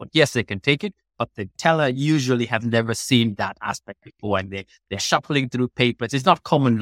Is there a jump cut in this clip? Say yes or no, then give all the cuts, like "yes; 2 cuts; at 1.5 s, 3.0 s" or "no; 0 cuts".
no; 0 cuts